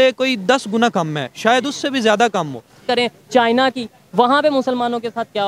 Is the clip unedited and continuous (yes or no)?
no